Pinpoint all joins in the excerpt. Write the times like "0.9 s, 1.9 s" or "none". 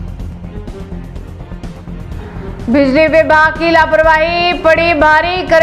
2.2 s